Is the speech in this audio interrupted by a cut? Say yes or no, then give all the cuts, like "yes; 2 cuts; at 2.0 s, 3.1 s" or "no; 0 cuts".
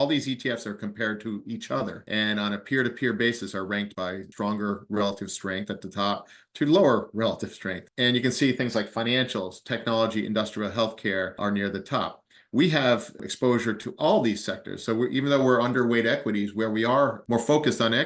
yes; 2 cuts; at 3.9 s, 17.2 s